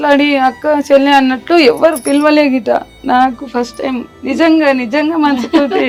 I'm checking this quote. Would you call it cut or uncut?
uncut